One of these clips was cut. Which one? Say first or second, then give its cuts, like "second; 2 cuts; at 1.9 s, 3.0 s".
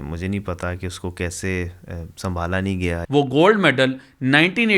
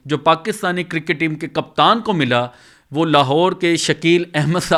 first; 1 cut; at 3.0 s